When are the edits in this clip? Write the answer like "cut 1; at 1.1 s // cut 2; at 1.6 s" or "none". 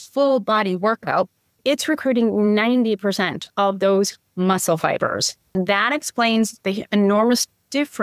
cut 1; at 1.6 s // cut 2; at 5.5 s